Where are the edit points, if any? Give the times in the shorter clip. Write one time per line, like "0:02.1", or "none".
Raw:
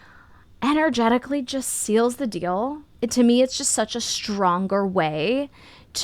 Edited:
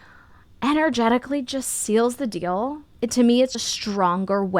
0:03.6